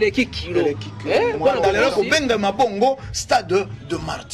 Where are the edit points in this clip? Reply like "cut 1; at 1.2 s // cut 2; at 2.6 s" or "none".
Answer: cut 1; at 1.7 s

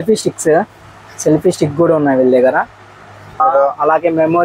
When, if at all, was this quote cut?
cut 1; at 3.4 s

